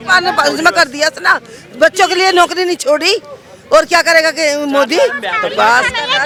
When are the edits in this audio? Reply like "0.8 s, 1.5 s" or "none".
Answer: none

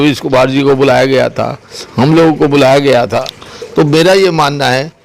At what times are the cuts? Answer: 3.3 s

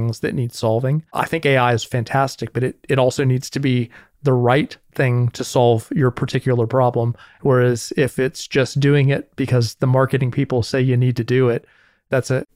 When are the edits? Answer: 1.1 s, 7.2 s

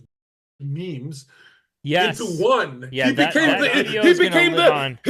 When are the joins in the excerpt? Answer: none

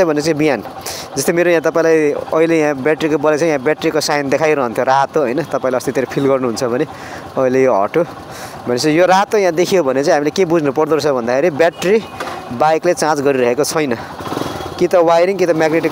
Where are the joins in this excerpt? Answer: none

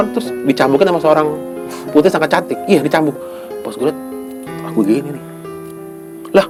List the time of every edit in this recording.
none

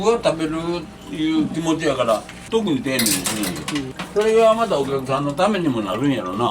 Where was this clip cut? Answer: 2.4 s, 3.9 s

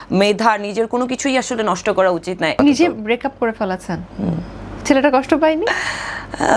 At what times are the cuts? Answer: 2.5 s

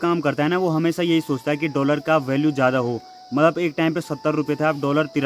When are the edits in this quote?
none

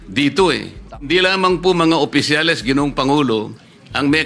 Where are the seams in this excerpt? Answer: 1.1 s

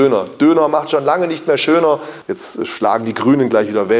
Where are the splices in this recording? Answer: 2.1 s

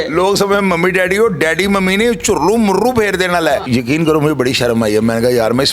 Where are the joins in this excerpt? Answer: 3.6 s

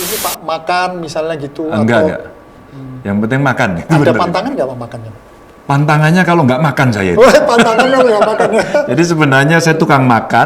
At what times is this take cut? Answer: 4.0 s

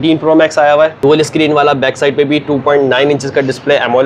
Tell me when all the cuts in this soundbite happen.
1.0 s

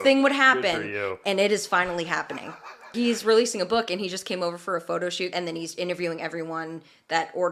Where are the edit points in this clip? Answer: 2.9 s, 5.3 s

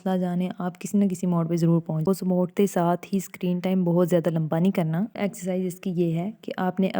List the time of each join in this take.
2.0 s, 5.2 s

